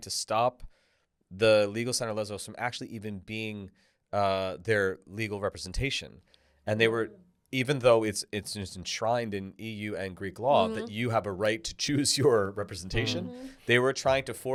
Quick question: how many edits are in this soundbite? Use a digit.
0